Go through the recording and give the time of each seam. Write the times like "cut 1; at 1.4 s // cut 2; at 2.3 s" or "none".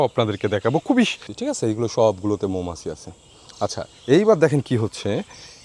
cut 1; at 1.3 s